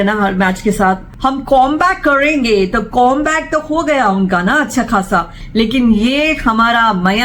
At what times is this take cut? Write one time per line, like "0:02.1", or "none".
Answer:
0:01.1
0:05.4

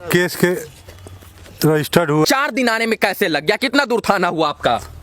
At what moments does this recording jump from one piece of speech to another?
0:02.3

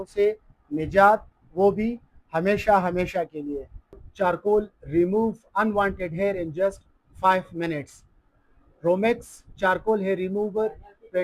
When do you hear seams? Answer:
none

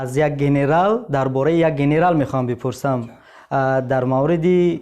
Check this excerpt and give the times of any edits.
none

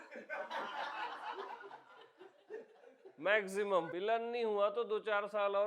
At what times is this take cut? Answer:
0:03.9

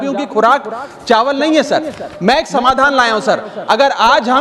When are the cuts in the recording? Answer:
0:02.0

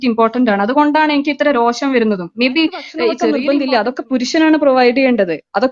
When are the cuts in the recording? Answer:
0:03.2

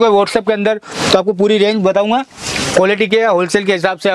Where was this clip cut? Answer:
none

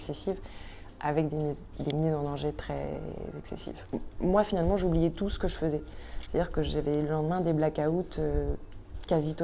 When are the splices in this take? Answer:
0:03.8

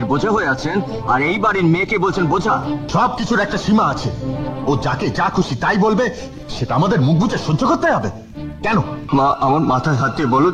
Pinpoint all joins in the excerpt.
0:02.8
0:09.0

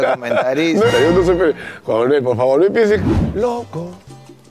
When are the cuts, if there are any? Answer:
0:00.9
0:03.1

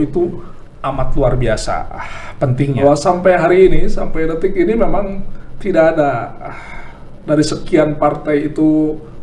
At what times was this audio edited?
0:02.8

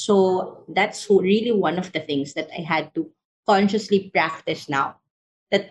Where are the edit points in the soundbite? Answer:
none

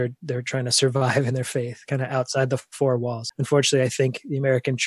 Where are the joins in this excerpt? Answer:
0:03.2

